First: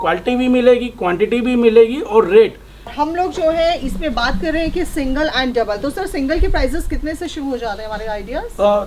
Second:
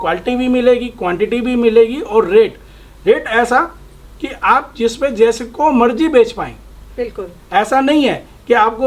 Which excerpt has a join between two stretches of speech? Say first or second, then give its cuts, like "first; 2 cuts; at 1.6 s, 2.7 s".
first; 1 cut; at 2.9 s